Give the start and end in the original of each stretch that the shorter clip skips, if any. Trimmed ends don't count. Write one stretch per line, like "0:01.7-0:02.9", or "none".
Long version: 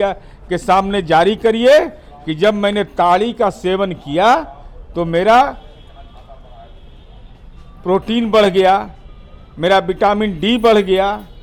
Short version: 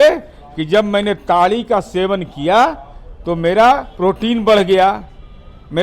0:05.6-0:07.7